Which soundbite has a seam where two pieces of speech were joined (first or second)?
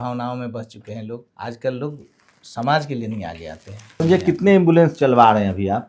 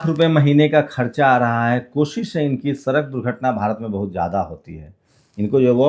first